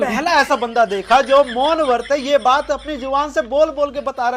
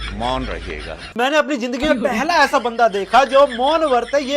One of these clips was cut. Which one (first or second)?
second